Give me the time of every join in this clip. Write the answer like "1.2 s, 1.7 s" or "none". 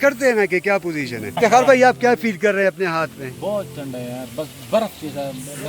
1.4 s